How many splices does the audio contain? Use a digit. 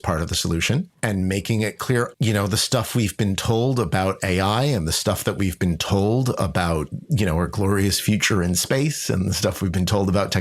2